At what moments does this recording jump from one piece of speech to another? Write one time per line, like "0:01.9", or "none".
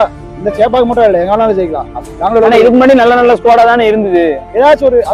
none